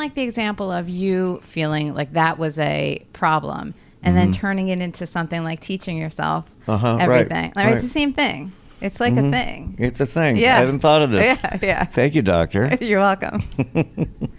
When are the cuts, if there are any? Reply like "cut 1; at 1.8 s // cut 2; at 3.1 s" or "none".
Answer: cut 1; at 1.5 s